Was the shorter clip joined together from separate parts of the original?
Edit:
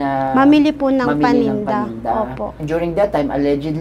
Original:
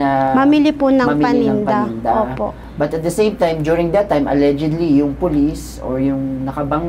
yes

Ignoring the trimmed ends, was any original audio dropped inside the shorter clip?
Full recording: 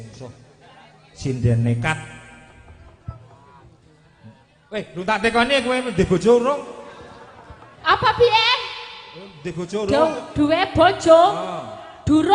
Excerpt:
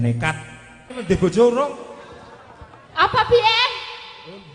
yes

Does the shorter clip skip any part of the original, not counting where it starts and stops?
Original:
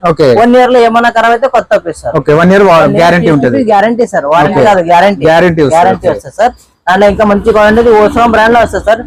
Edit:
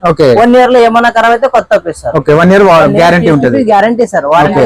no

